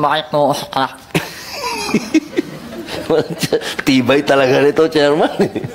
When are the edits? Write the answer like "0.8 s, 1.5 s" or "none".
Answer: none